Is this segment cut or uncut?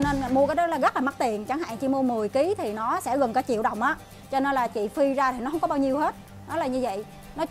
uncut